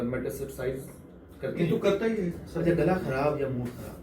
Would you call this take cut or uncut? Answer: cut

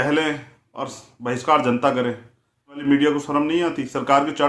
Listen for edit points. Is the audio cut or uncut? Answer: cut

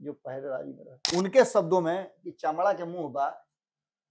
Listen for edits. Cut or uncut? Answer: cut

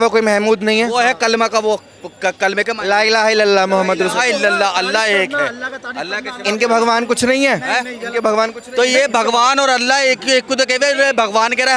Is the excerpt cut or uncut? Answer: uncut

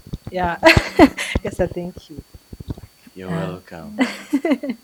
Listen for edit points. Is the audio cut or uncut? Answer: uncut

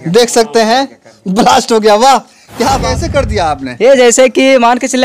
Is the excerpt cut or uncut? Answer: cut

